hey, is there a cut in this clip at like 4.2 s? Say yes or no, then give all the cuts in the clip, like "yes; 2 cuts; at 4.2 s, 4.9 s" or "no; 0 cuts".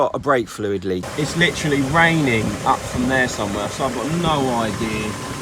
no; 1 cut; at 1.1 s